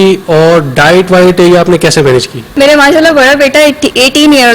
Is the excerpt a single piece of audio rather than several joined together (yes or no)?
no